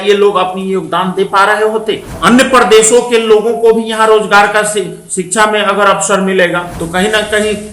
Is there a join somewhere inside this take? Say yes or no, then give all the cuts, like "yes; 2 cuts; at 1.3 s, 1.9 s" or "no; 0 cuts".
yes; 2 cuts; at 2.1 s, 6.8 s